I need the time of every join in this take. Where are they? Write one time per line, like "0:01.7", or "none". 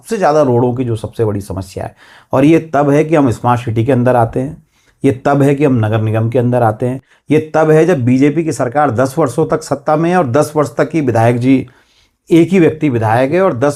none